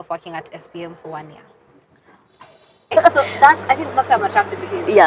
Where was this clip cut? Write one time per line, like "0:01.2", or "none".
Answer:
0:02.9